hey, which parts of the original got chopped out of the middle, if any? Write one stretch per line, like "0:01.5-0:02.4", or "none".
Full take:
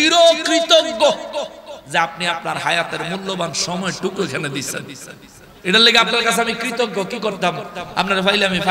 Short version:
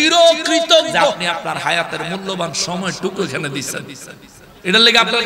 0:01.2-0:02.2